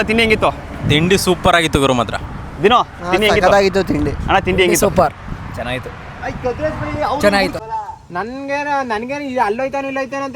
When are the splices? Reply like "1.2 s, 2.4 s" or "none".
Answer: 7.6 s